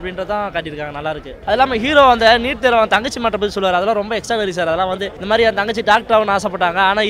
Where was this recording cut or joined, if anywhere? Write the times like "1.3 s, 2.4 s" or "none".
1.3 s, 5.1 s